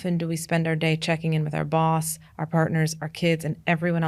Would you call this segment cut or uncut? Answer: uncut